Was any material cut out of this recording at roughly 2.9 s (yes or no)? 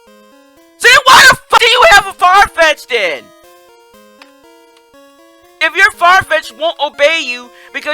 no